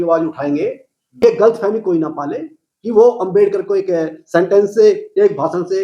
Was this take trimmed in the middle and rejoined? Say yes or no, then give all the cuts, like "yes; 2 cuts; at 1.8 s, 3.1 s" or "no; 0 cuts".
yes; 1 cut; at 1.2 s